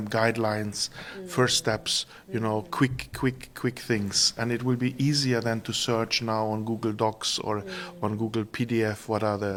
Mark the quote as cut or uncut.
uncut